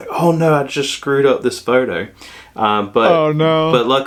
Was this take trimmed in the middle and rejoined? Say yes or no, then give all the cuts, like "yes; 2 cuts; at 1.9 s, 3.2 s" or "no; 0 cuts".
no; 0 cuts